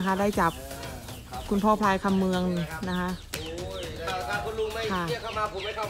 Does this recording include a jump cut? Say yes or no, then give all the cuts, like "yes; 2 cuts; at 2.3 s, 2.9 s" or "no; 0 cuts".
yes; 1 cut; at 4.1 s